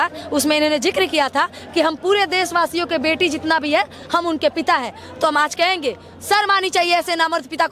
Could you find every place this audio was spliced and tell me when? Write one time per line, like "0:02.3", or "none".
none